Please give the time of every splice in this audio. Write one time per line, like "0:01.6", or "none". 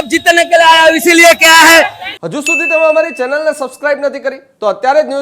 0:02.0